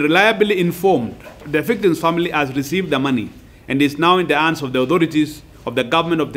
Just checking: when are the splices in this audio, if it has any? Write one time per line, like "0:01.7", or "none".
0:01.4